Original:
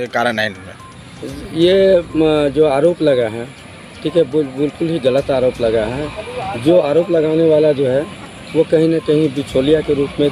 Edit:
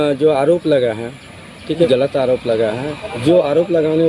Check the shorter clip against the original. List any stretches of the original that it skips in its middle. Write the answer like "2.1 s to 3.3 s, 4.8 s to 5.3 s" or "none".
4.2 s to 5.0 s, 6.2 s to 6.4 s

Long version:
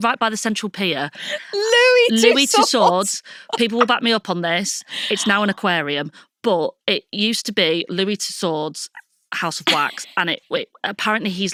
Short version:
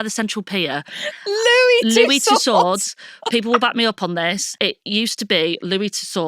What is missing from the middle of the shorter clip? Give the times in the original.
4.8 s to 6.8 s

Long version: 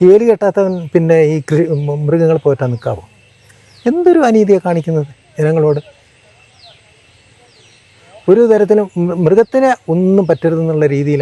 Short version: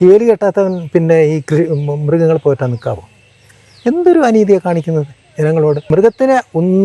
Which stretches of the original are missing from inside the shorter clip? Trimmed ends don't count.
5.9 s to 9.2 s

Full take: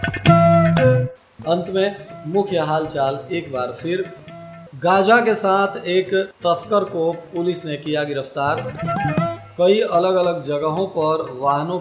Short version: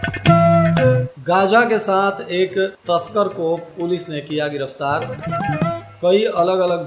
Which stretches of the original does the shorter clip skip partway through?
1.1 s to 4.7 s

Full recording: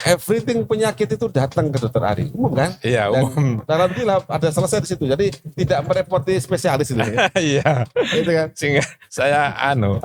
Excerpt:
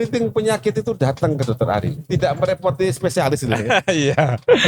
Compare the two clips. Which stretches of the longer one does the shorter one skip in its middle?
2.3 s to 5.4 s

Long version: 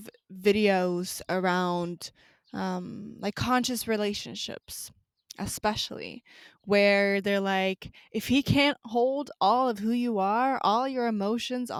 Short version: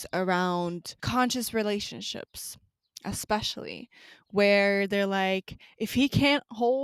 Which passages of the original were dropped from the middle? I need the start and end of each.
2.2 s to 3.4 s

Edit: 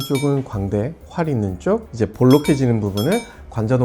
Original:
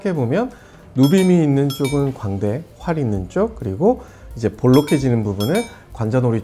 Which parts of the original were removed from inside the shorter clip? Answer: 3.6 s to 4.3 s

